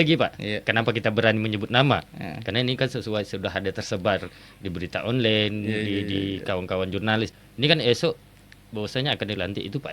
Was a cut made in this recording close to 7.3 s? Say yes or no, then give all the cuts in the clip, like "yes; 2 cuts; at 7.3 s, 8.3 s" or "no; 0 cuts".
yes; 1 cut; at 7.3 s